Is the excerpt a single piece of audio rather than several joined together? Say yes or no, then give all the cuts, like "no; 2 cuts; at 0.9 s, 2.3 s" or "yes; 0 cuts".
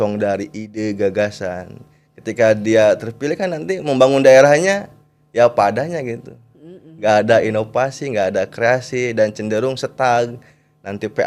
yes; 0 cuts